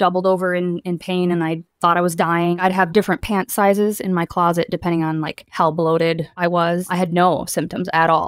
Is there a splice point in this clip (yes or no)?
yes